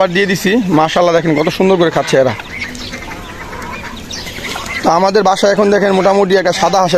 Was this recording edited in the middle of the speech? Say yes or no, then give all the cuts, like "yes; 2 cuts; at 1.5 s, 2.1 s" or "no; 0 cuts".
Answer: no; 0 cuts